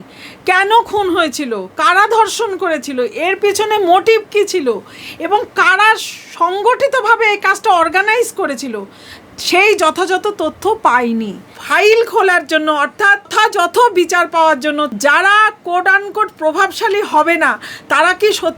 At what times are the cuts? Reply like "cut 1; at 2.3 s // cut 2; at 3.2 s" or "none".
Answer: cut 1; at 11.6 s // cut 2; at 13.3 s // cut 3; at 14.9 s

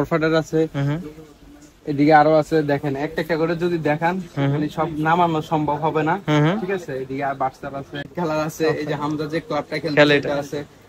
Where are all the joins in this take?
cut 1; at 8.1 s

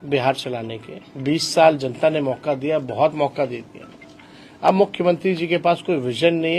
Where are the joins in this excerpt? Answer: none

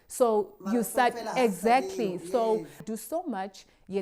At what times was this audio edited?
cut 1; at 2.8 s

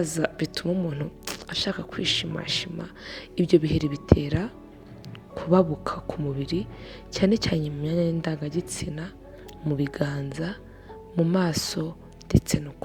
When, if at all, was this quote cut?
none

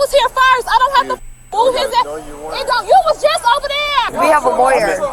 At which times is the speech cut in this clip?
cut 1; at 4.1 s

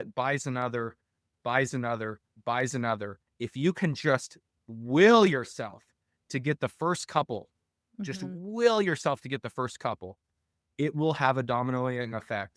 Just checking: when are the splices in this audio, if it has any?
none

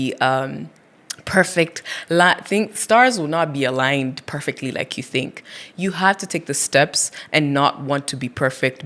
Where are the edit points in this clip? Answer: none

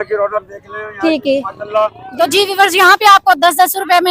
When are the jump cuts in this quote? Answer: cut 1; at 2.0 s

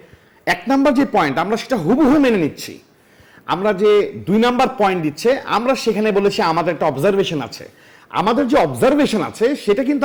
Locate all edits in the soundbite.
none

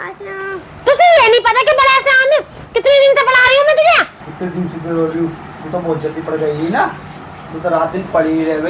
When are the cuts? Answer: cut 1; at 4.2 s

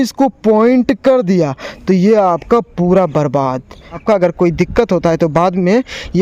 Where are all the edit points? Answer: cut 1; at 4.0 s

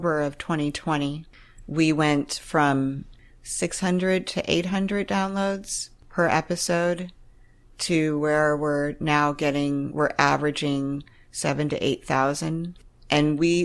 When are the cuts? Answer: cut 1; at 1.2 s // cut 2; at 3.1 s

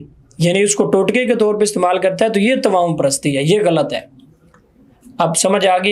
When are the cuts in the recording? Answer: none

